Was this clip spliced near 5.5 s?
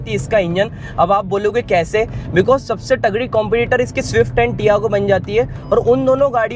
no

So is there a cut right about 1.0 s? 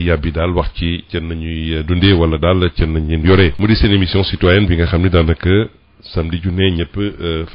no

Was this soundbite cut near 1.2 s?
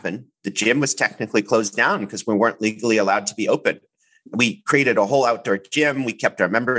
no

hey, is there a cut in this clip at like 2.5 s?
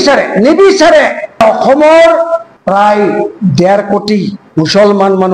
yes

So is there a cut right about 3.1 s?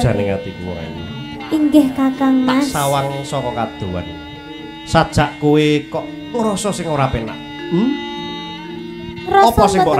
no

